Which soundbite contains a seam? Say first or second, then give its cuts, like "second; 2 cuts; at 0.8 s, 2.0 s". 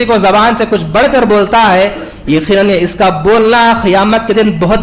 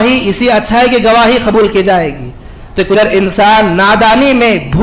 second; 1 cut; at 2.9 s